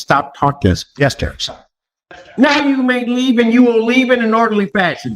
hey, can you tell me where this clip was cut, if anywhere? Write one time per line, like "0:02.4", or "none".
0:01.7